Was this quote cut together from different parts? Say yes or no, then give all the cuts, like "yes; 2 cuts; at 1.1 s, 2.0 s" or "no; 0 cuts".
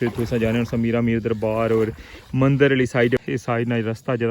yes; 1 cut; at 3.2 s